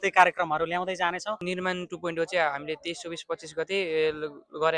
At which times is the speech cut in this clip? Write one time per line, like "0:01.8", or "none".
0:01.4